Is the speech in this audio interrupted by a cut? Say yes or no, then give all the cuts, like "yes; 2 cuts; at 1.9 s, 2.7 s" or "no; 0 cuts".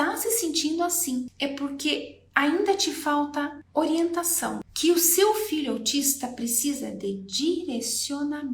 yes; 3 cuts; at 1.3 s, 3.6 s, 4.7 s